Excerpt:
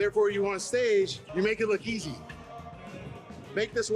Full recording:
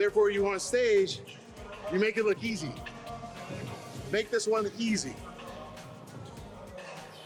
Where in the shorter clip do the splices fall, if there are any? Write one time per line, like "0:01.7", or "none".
0:01.2